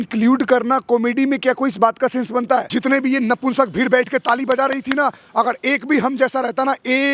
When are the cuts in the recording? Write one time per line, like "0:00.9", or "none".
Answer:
0:02.7